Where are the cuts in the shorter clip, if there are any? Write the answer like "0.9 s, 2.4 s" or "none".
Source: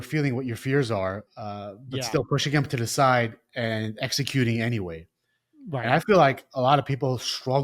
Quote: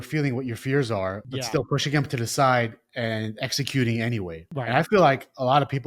1.3 s, 4.4 s